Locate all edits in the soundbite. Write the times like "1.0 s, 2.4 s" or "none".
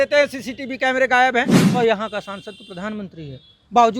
1.6 s